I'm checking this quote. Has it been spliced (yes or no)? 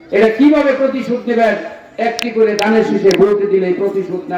no